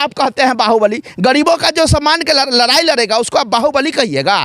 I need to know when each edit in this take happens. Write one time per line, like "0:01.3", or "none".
none